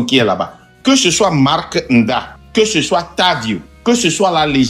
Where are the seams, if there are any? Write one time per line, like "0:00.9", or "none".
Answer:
0:02.4
0:03.7